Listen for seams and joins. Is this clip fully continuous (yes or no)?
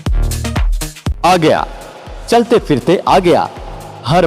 no